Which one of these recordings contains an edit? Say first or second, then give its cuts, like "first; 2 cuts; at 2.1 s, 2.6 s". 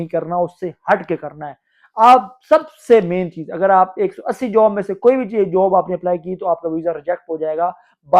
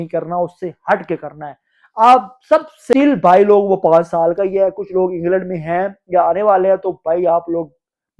second; 1 cut; at 2.9 s